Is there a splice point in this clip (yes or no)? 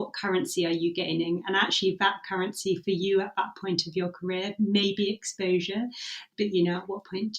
yes